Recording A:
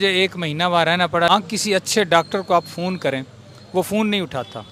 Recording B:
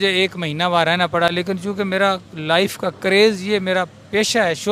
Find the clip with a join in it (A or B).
A